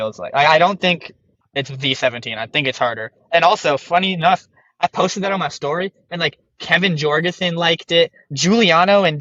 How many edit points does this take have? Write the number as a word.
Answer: one